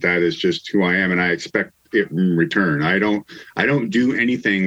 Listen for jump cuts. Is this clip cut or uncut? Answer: uncut